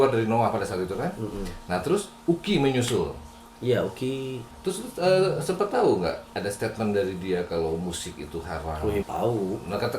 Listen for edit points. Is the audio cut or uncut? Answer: cut